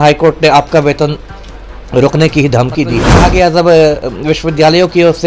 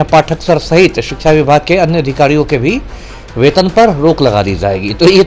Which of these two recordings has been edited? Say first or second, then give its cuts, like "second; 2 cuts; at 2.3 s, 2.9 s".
first; 1 cut; at 3.1 s